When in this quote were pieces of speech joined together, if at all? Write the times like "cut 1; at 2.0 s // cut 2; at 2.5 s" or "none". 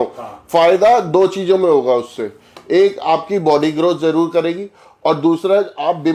none